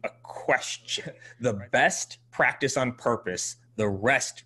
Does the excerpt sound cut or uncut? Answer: cut